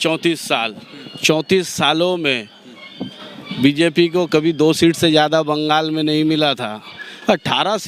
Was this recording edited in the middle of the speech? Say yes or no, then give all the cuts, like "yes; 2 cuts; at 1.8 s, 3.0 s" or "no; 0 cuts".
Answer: no; 0 cuts